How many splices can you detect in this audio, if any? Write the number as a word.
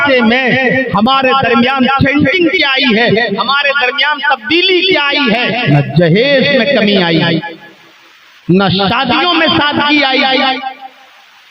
one